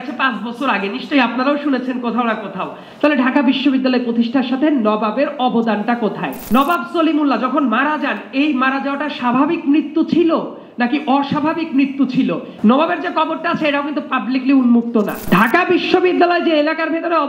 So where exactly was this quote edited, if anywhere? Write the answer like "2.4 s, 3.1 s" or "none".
6.4 s, 12.5 s, 15.2 s